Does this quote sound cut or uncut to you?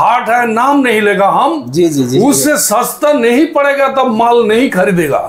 uncut